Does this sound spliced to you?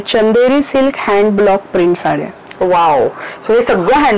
no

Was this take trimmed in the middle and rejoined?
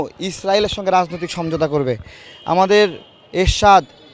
no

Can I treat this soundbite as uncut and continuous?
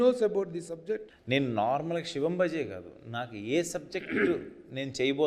no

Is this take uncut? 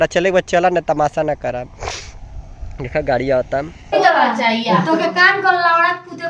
no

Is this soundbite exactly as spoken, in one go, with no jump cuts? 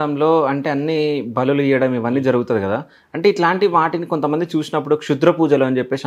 yes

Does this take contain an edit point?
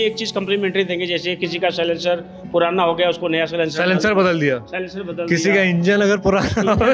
no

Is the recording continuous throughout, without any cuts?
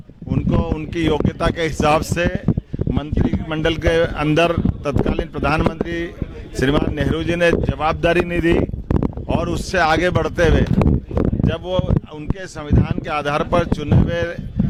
yes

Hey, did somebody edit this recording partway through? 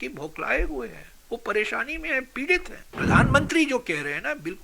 yes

